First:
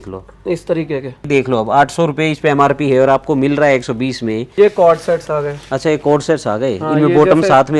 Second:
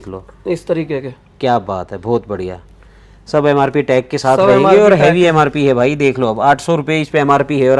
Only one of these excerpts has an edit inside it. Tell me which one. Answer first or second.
first